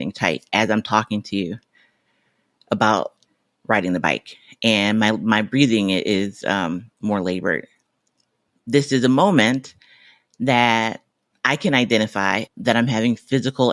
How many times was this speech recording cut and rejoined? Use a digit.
0